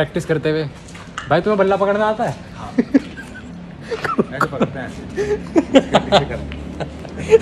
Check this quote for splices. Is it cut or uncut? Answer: uncut